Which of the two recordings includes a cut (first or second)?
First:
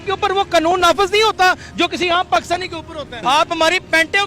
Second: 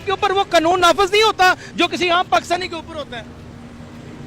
first